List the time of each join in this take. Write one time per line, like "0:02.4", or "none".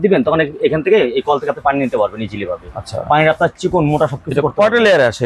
none